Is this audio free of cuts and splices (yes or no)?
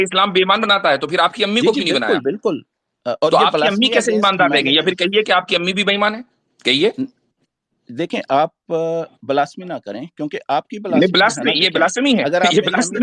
yes